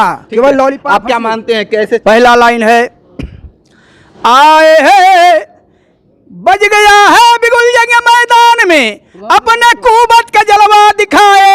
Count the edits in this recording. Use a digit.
1